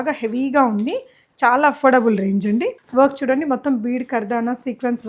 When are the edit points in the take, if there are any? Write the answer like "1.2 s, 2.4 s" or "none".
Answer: 2.8 s

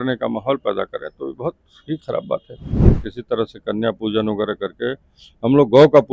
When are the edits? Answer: 3.1 s

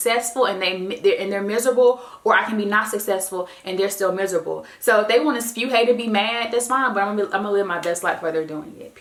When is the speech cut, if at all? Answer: none

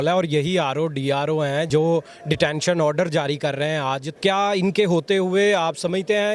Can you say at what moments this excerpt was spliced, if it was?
1.7 s, 4.1 s

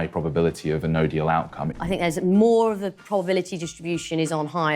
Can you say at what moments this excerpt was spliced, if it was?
1.6 s

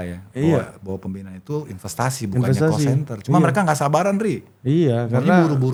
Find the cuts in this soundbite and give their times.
none

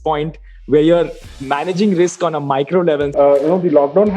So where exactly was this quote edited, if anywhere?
3.1 s

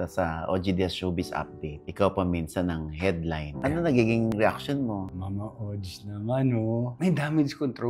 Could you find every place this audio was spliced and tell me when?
3.6 s, 5.1 s

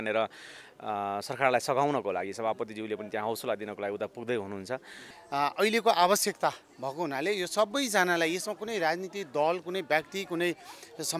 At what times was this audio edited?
5.1 s

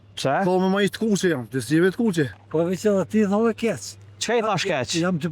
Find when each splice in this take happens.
2.4 s

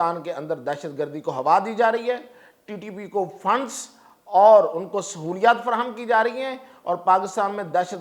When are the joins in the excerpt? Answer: none

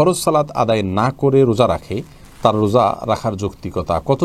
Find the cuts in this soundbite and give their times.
none

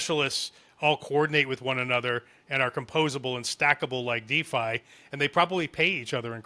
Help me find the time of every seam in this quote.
none

